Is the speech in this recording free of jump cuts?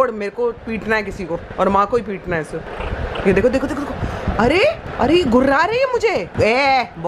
yes; 0 cuts

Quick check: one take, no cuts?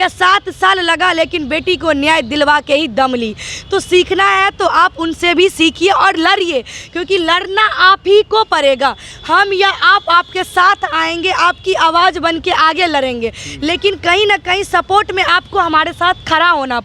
yes; 0 cuts

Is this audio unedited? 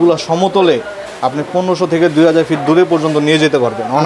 yes; 0 cuts

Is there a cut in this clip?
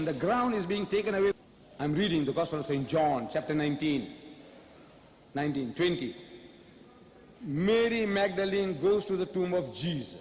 no; 0 cuts

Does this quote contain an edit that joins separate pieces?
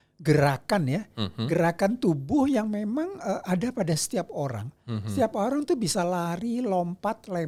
no; 0 cuts

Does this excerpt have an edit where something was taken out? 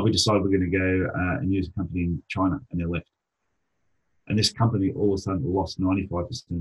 no; 0 cuts

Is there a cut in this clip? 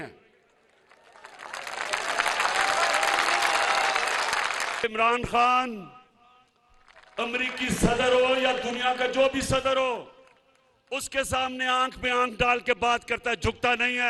yes; 1 cut; at 4.8 s

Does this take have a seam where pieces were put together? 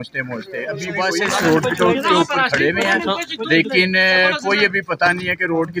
yes; 1 cut; at 1.1 s

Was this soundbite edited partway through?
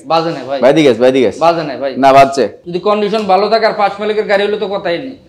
yes; 1 cut; at 2.7 s

